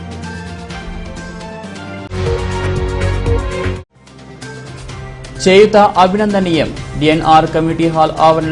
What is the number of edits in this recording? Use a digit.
1